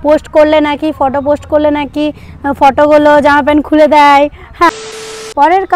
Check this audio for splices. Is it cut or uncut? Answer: cut